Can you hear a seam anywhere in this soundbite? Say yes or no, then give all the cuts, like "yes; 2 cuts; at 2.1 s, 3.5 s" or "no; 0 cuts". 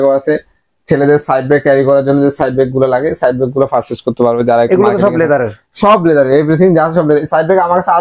no; 0 cuts